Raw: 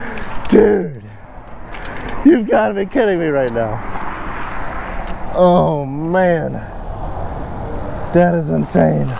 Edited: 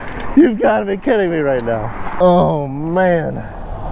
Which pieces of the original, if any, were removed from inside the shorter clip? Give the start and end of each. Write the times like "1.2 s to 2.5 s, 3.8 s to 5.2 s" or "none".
4.0 s to 5.3 s